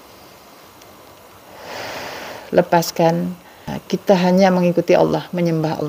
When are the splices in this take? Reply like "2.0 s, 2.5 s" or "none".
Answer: 3.7 s